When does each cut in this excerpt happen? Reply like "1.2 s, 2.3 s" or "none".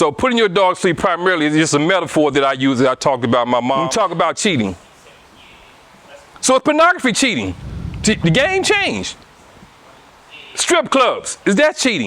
3.9 s